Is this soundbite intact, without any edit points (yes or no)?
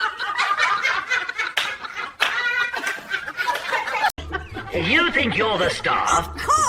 no